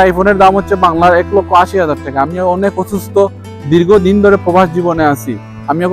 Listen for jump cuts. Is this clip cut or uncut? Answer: uncut